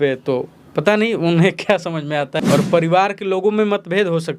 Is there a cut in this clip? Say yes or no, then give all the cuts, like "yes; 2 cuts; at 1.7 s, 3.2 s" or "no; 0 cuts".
yes; 1 cut; at 2.4 s